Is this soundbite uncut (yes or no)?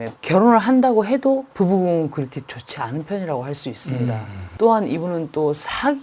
no